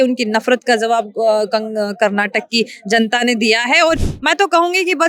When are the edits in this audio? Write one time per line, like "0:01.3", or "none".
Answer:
0:04.0